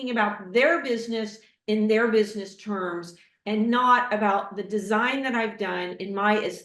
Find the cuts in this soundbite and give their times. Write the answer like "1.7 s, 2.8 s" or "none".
none